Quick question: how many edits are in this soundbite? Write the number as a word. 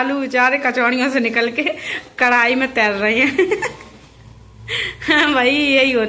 zero